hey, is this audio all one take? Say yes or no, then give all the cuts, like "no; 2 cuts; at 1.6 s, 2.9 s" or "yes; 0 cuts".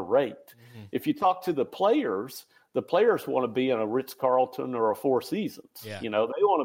yes; 0 cuts